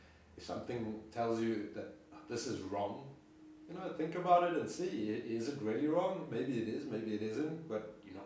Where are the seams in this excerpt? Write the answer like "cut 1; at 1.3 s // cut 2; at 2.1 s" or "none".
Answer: none